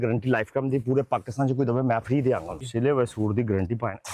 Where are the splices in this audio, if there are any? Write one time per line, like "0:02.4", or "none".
0:02.6